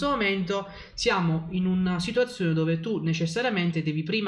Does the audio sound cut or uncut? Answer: uncut